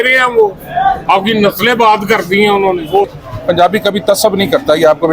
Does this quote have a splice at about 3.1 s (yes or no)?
yes